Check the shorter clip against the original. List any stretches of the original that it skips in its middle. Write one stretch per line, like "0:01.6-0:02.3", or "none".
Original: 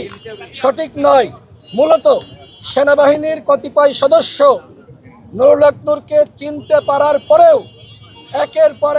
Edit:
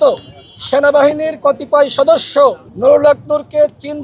0:04.7-0:05.2